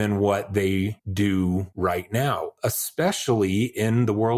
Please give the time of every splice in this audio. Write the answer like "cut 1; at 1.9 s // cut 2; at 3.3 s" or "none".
cut 1; at 1.0 s // cut 2; at 1.7 s